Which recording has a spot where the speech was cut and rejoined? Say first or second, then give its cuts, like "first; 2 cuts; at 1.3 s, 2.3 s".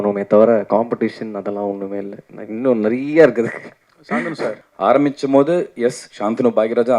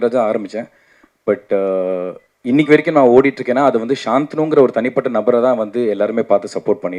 first; 1 cut; at 4.6 s